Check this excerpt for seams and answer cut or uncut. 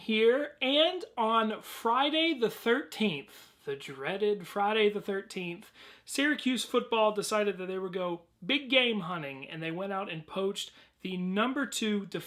uncut